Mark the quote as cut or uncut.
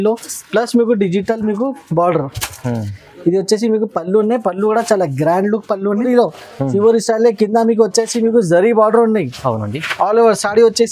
cut